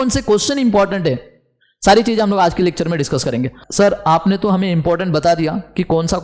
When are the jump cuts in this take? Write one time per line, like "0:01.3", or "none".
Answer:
0:03.6